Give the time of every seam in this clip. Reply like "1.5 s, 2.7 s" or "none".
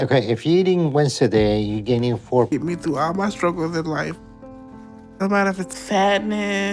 2.5 s